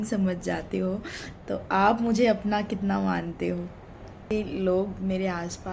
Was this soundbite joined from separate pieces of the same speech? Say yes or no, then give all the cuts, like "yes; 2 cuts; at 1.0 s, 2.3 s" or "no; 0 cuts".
yes; 1 cut; at 4.3 s